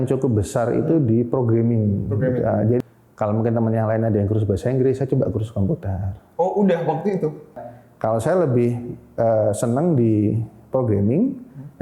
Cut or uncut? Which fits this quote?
cut